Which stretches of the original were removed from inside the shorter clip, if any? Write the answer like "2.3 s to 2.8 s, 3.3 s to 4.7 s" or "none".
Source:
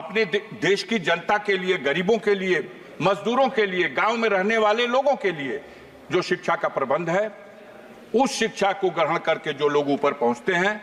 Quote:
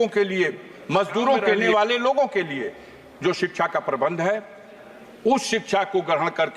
3.7 s to 4.5 s